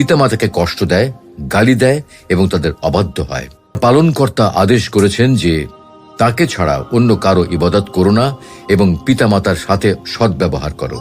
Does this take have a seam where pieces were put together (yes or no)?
yes